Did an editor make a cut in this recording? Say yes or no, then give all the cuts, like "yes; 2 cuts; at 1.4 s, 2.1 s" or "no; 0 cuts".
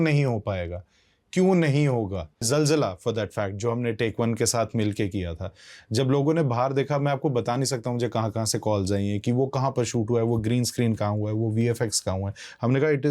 yes; 1 cut; at 2.5 s